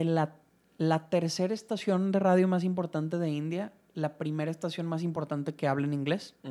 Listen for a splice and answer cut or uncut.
uncut